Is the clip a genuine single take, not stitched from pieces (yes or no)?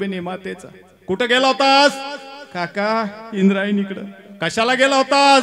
yes